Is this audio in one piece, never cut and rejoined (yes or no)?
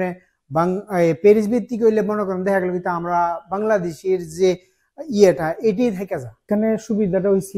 no